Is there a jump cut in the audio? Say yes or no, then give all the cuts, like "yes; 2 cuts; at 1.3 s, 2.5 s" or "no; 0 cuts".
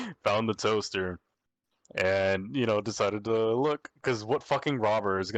no; 0 cuts